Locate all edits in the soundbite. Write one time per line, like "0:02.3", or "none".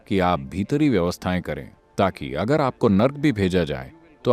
0:01.8